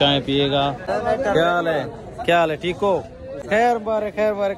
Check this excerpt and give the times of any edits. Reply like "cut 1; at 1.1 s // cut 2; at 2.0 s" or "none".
cut 1; at 0.9 s // cut 2; at 3.4 s